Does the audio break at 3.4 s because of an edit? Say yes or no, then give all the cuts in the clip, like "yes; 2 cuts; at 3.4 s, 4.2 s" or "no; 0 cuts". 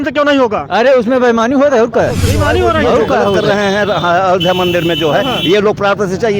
yes; 1 cut; at 3.4 s